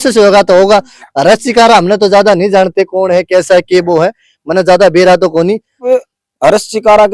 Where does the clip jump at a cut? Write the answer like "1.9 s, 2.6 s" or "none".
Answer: 5.8 s